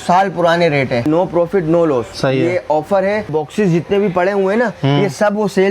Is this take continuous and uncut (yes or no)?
no